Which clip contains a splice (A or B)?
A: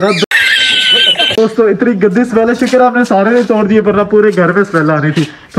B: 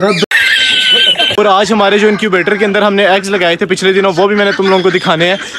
B